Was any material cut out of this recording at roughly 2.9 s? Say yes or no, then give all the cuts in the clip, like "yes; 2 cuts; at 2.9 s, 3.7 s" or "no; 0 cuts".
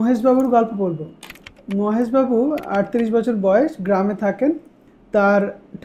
no; 0 cuts